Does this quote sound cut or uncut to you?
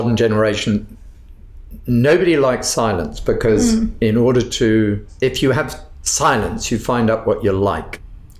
uncut